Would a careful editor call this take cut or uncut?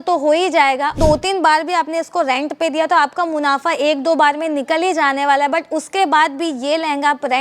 cut